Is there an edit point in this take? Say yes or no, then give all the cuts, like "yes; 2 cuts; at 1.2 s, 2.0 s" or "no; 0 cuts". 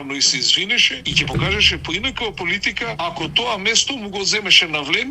yes; 2 cuts; at 1.0 s, 2.9 s